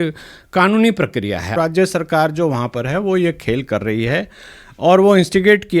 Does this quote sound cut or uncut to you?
cut